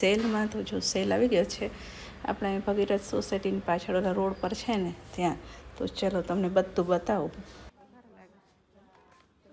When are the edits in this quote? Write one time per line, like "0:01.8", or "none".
none